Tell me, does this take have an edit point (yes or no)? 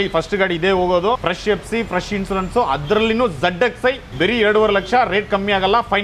yes